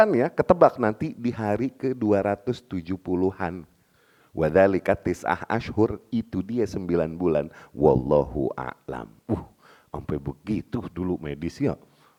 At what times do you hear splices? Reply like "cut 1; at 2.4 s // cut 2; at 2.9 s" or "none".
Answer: none